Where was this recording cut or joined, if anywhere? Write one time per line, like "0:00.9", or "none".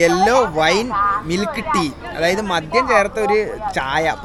none